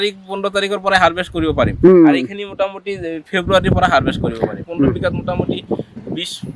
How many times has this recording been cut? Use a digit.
1